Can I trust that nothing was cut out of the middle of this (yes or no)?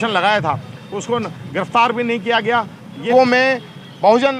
no